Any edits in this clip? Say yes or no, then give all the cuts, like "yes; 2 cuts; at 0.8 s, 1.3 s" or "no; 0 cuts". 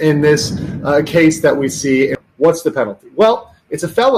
yes; 1 cut; at 2.2 s